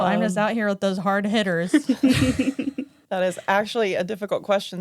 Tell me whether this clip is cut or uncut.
cut